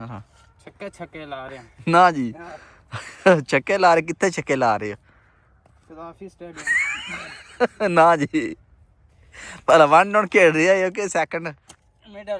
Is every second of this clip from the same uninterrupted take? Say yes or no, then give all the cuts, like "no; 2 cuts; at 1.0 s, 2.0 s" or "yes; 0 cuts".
yes; 0 cuts